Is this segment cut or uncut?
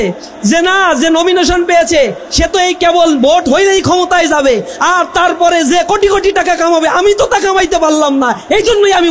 uncut